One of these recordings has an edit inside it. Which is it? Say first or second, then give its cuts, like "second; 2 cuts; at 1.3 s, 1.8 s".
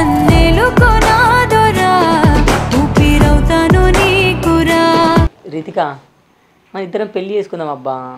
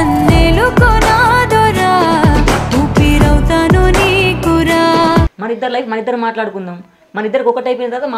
second; 1 cut; at 5.4 s